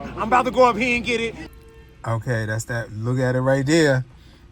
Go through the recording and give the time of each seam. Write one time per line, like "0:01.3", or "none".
0:01.5